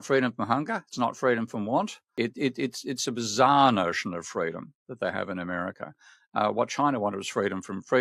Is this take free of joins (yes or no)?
no